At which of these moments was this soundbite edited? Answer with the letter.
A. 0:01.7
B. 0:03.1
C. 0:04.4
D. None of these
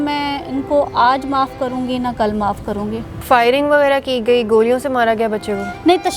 B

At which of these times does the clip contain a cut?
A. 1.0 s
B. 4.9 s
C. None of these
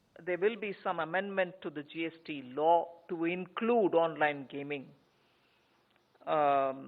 A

